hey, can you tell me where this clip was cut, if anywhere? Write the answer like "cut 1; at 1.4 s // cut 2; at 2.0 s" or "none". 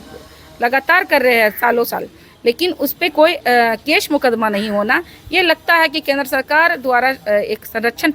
none